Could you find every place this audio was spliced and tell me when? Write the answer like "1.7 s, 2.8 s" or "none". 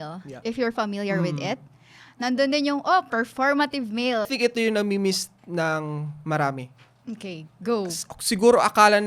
4.3 s